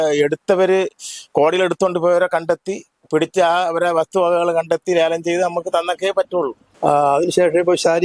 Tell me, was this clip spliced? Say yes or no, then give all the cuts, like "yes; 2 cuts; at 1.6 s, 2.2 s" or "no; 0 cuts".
yes; 1 cut; at 6.6 s